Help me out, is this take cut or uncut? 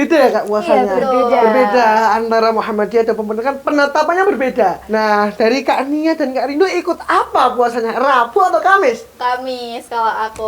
cut